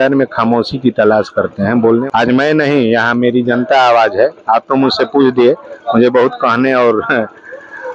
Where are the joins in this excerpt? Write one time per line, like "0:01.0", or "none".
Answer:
0:02.0

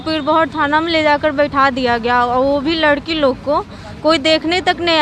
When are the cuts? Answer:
none

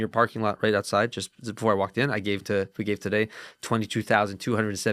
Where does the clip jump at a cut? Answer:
none

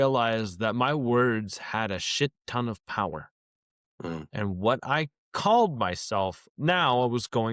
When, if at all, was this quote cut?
0:06.5

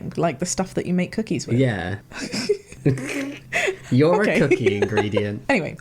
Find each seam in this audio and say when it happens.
none

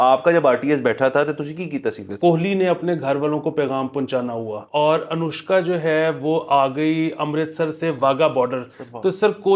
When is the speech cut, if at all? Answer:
0:02.1
0:04.6

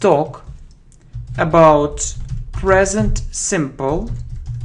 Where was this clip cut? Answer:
0:01.7

